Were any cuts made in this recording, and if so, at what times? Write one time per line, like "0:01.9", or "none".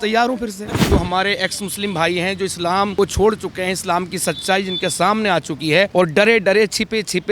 0:00.9
0:02.9
0:05.9